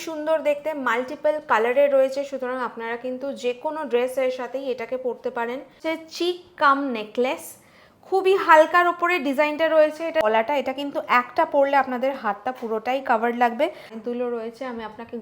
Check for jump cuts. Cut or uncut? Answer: cut